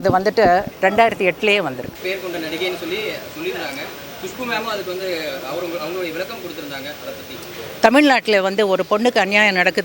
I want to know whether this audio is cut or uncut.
cut